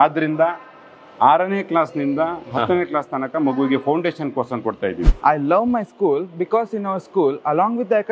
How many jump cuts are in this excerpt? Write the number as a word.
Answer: one